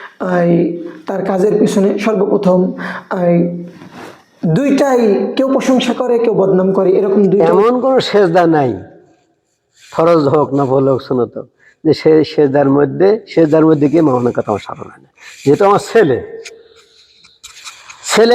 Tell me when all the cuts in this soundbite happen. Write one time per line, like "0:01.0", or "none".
0:07.4